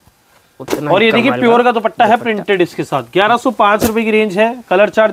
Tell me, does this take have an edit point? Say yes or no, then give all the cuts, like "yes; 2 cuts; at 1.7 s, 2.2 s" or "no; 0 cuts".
no; 0 cuts